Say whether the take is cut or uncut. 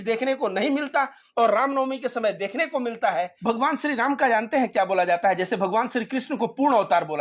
cut